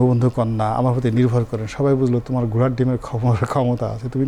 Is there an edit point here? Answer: no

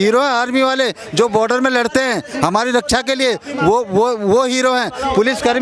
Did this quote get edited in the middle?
no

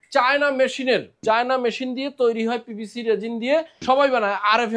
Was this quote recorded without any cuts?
no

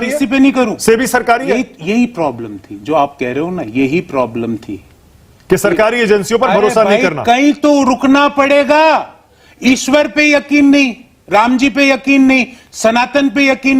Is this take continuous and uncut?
yes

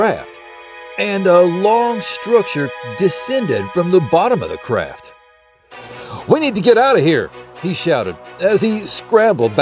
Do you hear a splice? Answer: no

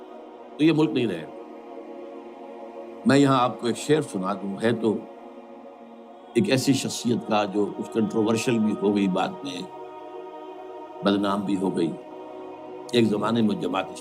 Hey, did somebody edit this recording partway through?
yes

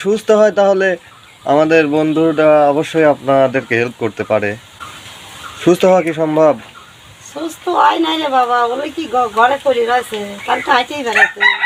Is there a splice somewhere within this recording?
no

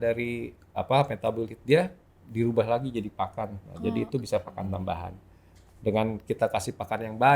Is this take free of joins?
yes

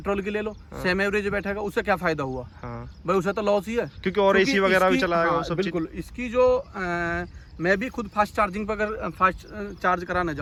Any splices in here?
no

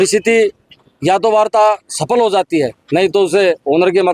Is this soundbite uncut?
yes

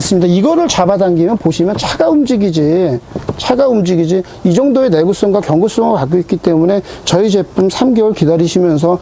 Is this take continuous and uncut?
yes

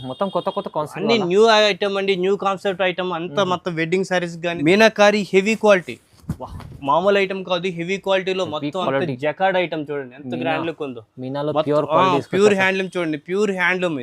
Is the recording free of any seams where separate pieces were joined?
no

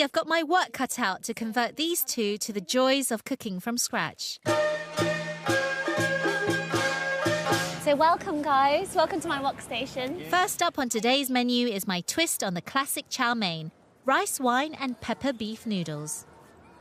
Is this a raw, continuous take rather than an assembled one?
yes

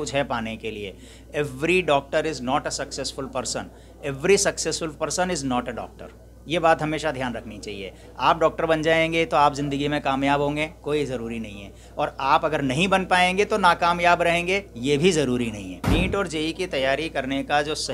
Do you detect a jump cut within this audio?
yes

